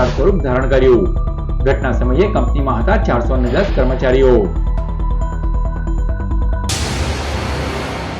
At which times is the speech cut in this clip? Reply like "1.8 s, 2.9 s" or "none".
6.6 s